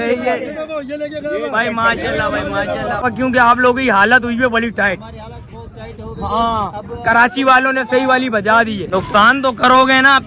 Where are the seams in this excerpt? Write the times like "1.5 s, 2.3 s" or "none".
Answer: 3.0 s, 8.9 s